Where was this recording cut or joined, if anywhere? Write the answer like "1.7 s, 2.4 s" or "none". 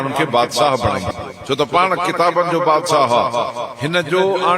1.2 s